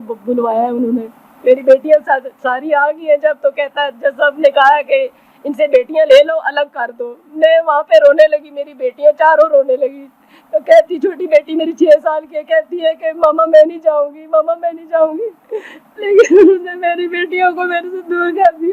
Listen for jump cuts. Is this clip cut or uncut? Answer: uncut